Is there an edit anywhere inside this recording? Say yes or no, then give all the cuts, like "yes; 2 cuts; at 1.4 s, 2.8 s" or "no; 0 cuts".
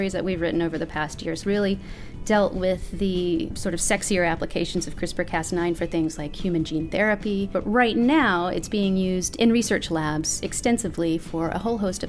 yes; 3 cuts; at 1.4 s, 3.5 s, 7.6 s